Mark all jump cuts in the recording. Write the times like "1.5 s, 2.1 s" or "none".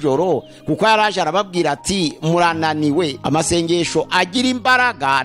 3.2 s